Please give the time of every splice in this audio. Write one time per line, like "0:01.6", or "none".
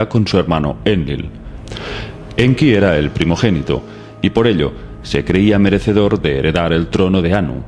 0:06.2